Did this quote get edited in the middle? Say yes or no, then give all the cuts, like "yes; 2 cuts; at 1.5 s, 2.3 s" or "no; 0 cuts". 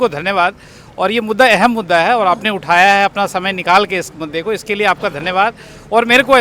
no; 0 cuts